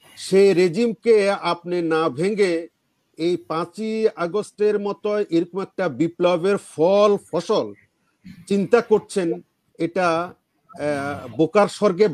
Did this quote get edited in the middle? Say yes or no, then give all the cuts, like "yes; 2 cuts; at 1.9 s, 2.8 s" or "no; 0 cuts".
no; 0 cuts